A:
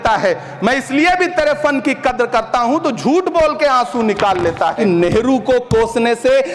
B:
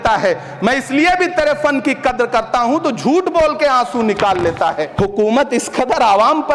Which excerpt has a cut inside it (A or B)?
B